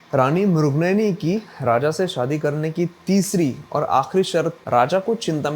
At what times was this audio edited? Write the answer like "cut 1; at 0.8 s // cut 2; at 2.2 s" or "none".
cut 1; at 4.6 s